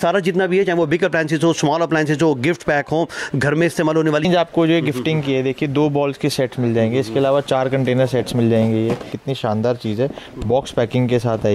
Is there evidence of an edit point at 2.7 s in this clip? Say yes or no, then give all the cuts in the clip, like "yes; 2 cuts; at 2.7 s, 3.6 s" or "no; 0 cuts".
no; 2 cuts; at 4.2 s, 9.2 s